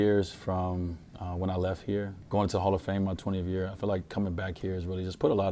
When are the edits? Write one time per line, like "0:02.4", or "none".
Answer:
0:02.2